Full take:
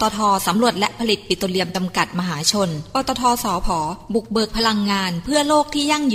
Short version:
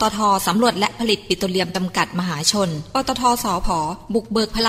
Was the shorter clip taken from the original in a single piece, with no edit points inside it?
yes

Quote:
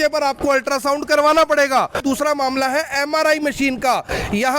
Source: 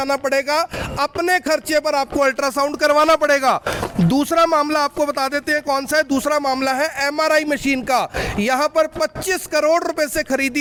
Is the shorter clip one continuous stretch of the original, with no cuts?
no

